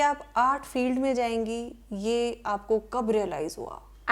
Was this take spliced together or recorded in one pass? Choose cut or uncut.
uncut